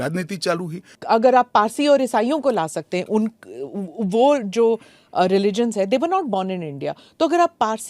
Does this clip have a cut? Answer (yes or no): yes